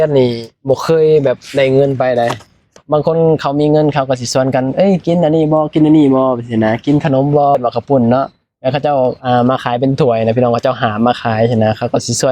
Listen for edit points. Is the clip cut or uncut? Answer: cut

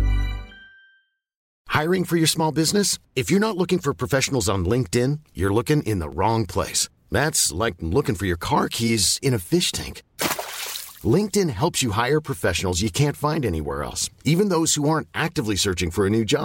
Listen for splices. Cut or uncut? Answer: cut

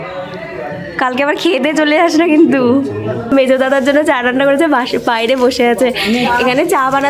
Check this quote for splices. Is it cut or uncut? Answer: cut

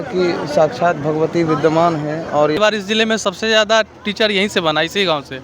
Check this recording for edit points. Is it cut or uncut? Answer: cut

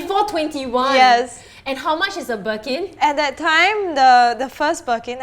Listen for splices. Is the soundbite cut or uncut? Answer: uncut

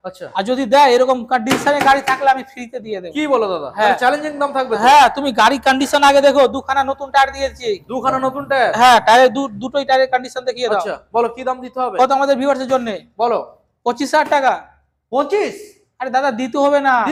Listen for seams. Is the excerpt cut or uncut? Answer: uncut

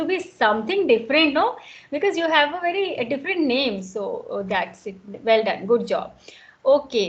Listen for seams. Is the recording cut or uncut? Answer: uncut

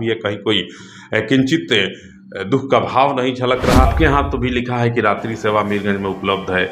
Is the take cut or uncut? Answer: cut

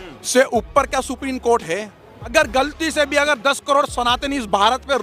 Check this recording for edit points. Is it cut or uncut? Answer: cut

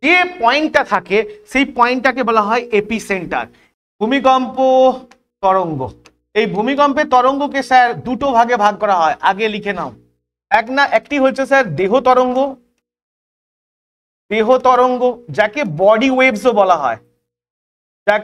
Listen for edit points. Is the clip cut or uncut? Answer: cut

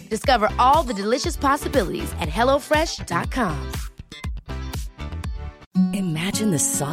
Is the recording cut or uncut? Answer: cut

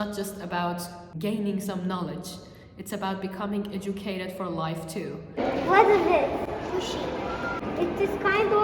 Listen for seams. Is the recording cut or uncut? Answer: cut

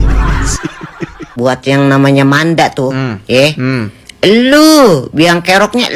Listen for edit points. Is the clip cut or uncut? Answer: cut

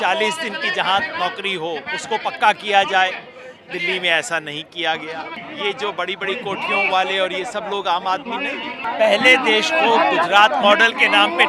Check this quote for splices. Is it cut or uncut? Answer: cut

